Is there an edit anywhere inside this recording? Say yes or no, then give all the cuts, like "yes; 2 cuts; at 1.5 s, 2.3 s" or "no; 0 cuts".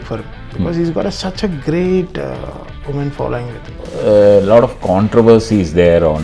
yes; 1 cut; at 3.8 s